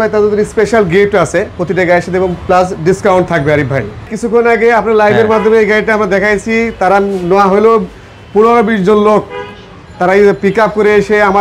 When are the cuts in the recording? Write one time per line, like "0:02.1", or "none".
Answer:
0:04.2

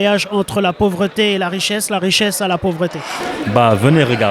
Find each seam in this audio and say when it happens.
0:03.2

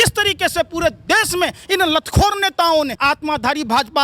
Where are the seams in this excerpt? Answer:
none

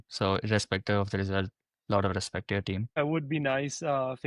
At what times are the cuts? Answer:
0:03.0

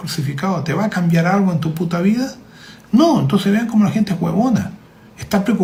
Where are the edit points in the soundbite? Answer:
none

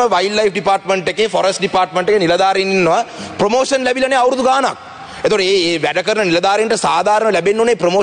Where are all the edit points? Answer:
none

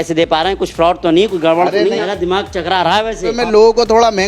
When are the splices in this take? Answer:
0:02.0
0:03.4

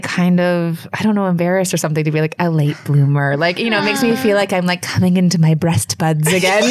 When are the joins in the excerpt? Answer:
none

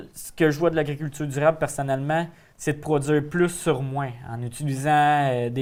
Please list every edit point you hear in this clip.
none

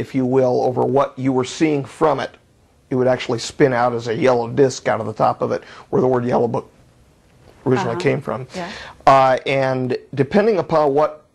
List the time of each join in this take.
none

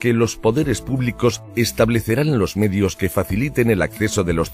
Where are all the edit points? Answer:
none

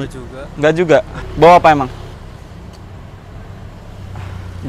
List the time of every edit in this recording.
0:01.2
0:02.1

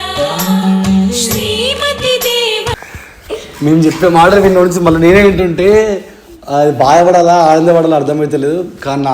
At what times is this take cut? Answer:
none

